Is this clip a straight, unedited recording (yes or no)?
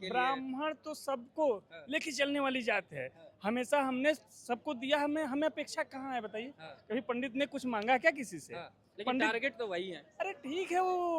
yes